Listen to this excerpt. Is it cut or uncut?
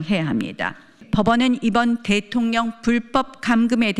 cut